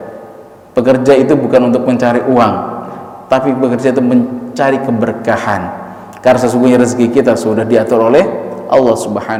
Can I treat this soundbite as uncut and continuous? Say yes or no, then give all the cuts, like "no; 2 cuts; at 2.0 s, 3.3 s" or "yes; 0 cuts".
yes; 0 cuts